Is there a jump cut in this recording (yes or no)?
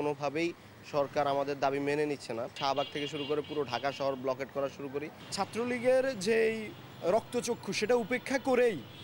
yes